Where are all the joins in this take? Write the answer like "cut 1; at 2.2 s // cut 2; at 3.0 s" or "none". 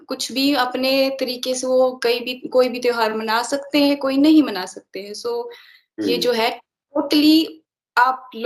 none